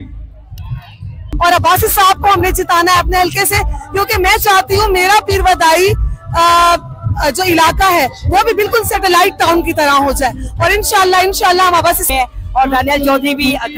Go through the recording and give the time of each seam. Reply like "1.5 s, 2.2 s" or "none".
1.3 s, 12.1 s